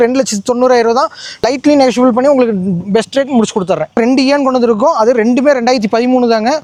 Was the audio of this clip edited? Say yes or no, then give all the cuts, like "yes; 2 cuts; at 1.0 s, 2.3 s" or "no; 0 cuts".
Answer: no; 0 cuts